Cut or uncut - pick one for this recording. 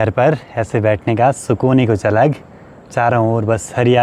uncut